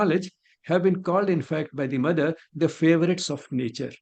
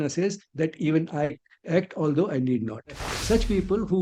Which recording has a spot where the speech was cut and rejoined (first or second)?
second